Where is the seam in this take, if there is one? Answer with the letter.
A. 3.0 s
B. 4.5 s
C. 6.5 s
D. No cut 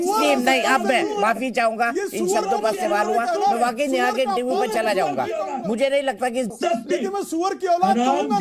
C